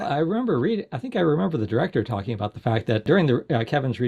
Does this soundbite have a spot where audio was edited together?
yes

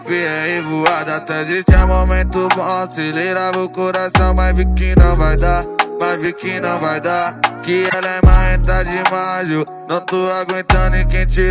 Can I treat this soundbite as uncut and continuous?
no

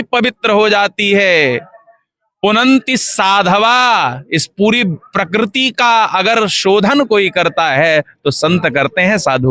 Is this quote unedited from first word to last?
yes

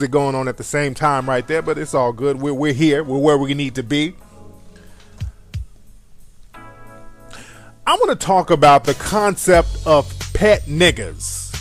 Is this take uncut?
yes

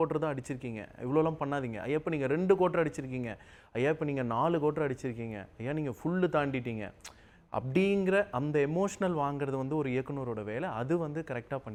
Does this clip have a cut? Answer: no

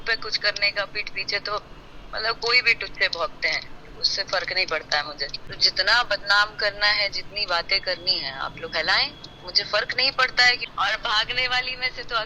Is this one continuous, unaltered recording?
no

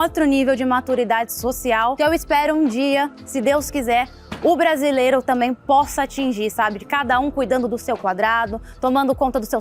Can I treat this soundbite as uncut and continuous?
yes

